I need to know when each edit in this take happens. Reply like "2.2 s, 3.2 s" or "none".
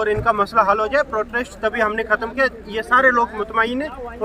none